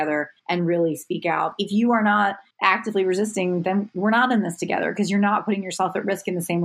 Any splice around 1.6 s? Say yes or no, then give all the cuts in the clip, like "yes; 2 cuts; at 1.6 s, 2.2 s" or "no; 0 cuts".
yes; 1 cut; at 1.6 s